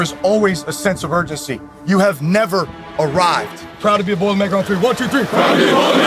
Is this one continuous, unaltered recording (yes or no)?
no